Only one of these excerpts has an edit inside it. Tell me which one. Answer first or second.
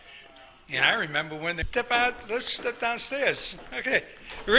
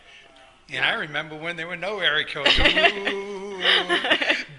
second